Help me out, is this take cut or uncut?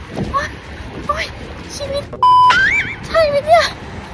uncut